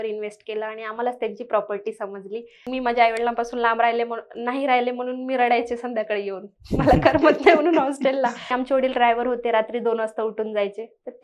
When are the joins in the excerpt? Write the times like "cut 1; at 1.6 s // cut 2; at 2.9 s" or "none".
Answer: cut 1; at 2.6 s // cut 2; at 8.4 s